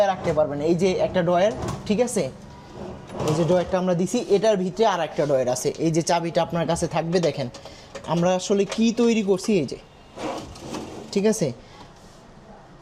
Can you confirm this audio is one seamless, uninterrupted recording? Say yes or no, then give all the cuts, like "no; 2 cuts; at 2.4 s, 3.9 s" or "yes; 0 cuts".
yes; 0 cuts